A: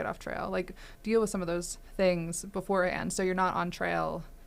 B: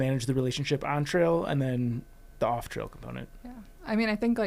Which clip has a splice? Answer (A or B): A